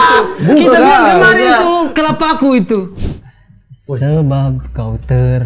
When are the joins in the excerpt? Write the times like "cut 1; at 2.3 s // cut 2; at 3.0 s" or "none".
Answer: cut 1; at 2.9 s